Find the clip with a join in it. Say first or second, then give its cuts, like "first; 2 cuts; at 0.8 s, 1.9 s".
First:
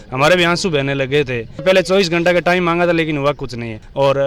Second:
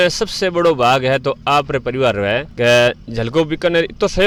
first; 1 cut; at 1.6 s